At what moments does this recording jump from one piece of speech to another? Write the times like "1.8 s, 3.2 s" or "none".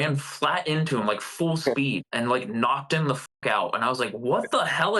none